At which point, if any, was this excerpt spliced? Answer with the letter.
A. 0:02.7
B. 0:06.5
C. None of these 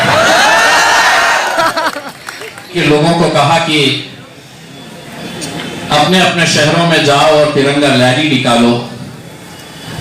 A